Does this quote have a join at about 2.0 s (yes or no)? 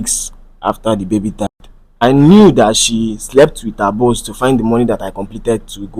yes